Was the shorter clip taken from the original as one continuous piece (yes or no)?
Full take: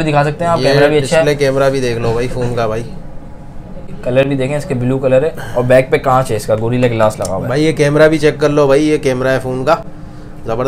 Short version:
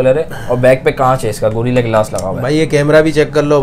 yes